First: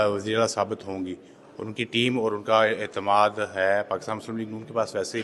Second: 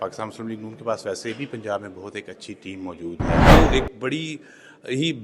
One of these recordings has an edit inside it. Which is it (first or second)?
second